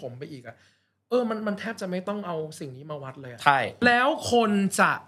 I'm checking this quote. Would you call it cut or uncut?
cut